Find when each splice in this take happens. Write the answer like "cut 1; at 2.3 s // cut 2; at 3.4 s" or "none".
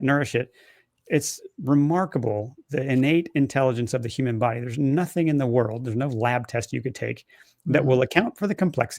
none

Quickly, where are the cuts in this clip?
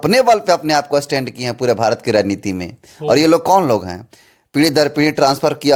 none

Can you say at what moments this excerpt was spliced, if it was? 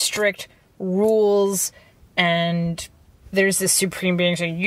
cut 1; at 3.1 s

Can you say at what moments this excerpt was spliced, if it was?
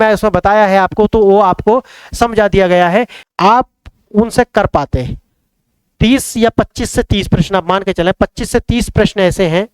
cut 1; at 3.2 s

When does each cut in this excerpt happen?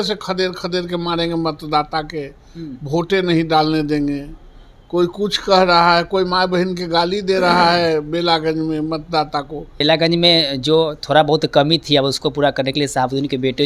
cut 1; at 9.8 s

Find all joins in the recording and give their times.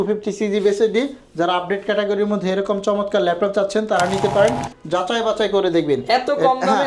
cut 1; at 4.7 s

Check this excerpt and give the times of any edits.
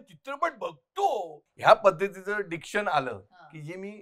cut 1; at 1.4 s

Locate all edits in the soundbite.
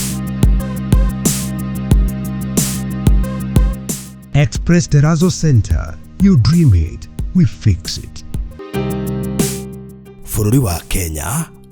cut 1; at 8.6 s

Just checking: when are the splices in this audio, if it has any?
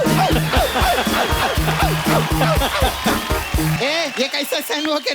cut 1; at 3.8 s

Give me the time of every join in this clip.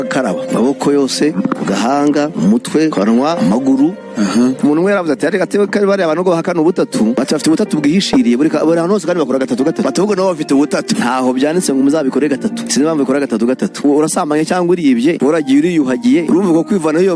none

